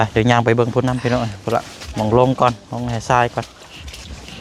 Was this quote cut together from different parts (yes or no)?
no